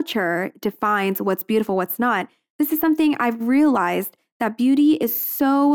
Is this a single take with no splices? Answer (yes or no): yes